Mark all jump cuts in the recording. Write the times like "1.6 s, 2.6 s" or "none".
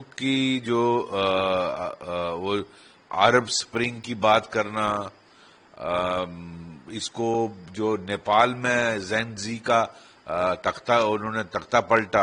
none

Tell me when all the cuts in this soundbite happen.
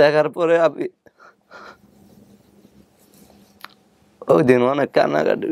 none

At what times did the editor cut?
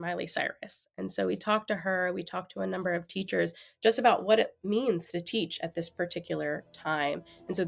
none

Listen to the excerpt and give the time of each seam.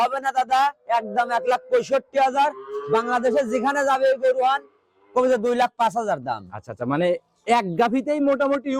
none

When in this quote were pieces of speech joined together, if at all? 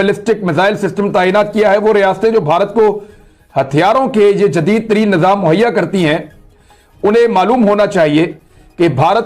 none

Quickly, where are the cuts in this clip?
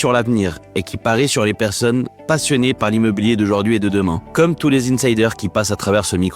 4.2 s

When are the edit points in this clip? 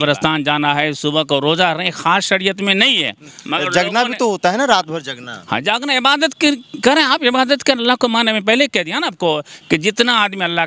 none

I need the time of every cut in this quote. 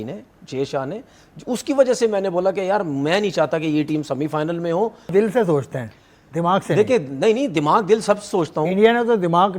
5.1 s

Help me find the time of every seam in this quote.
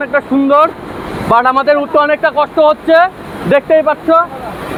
none

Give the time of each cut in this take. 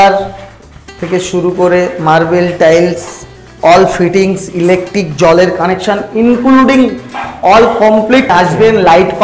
8.3 s

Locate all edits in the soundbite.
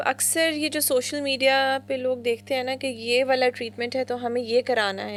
none

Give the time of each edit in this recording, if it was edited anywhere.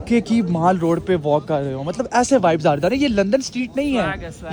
none

